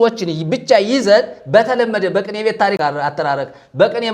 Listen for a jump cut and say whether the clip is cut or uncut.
cut